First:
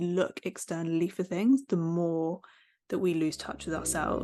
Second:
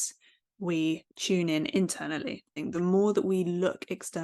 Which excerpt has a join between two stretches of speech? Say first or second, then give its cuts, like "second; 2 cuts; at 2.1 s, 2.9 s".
second; 2 cuts; at 1.1 s, 2.5 s